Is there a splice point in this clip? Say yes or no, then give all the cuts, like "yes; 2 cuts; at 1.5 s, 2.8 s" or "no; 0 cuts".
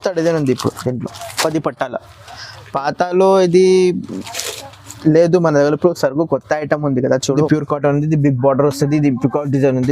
yes; 1 cut; at 7.4 s